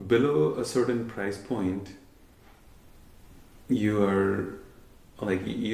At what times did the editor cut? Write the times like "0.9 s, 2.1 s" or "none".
none